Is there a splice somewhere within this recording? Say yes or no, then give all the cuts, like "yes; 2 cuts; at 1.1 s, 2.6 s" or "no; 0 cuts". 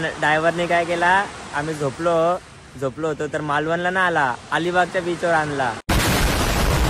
yes; 1 cut; at 5.8 s